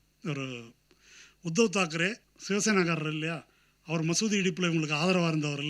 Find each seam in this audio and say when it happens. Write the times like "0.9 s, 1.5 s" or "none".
2.3 s